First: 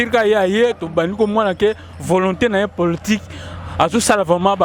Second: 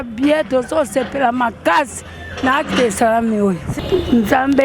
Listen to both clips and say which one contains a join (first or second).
second